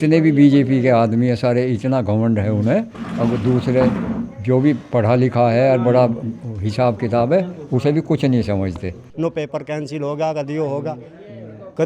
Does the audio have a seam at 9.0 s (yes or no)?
yes